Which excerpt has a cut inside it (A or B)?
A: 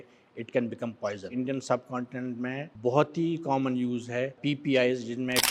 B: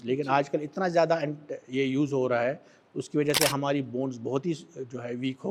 A